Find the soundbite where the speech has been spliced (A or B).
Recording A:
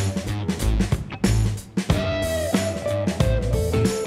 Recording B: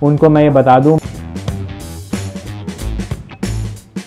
B